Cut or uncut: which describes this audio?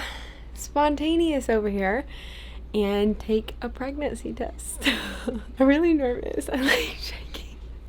cut